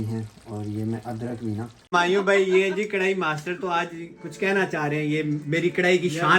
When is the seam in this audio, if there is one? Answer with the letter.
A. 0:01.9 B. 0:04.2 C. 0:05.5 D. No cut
A